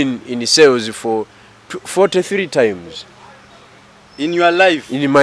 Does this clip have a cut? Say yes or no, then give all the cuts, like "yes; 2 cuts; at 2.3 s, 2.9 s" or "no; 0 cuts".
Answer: no; 0 cuts